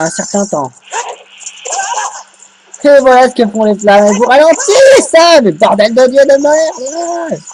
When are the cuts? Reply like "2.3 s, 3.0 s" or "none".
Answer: none